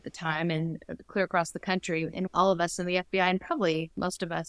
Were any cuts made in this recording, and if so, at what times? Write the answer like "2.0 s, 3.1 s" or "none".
2.2 s

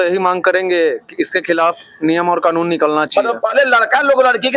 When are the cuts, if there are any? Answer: none

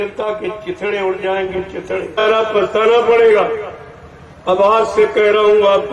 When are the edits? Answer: 2.2 s

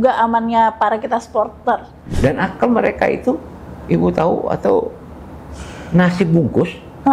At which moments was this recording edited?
2.0 s

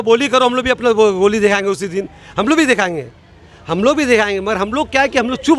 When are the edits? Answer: none

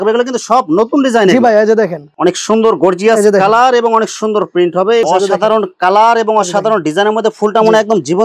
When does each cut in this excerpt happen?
2.1 s, 5.1 s

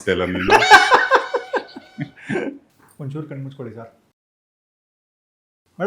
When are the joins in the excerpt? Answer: 2.7 s

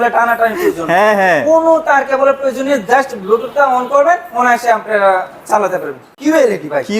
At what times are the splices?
6.1 s

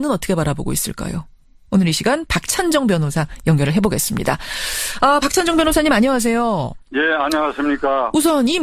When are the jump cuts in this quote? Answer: 7.4 s

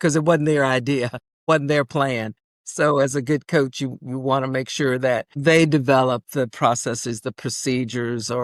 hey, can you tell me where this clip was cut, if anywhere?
none

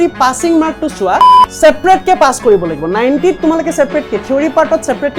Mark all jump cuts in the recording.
1.4 s

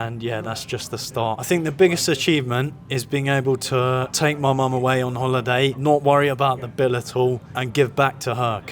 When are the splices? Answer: 1.4 s, 4.1 s, 5.8 s

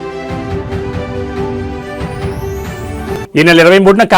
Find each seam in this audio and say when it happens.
2.7 s

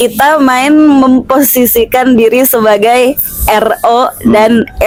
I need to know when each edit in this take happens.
none

